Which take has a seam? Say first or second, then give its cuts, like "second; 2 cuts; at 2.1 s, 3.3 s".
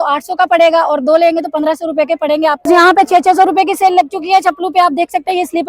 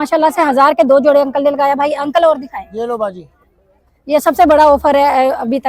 first; 1 cut; at 2.7 s